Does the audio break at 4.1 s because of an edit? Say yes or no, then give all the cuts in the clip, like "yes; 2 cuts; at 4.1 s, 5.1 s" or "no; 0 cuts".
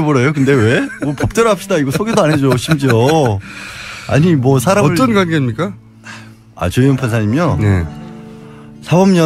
yes; 1 cut; at 4.1 s